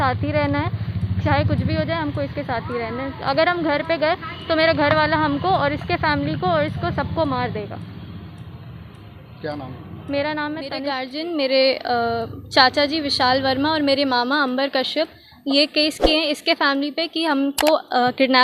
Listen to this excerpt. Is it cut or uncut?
uncut